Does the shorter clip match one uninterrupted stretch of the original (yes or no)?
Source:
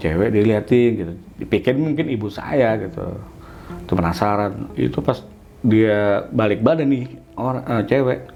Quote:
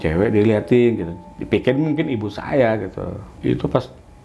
no